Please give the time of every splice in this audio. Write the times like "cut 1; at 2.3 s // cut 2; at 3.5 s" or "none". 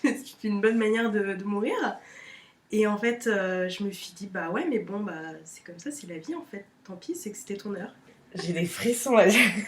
cut 1; at 8.0 s